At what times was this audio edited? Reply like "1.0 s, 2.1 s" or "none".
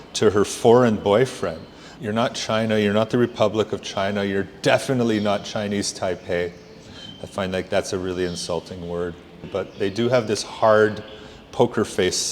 1.9 s, 9.5 s